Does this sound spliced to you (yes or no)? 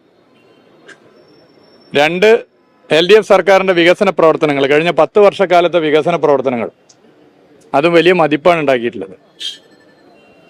no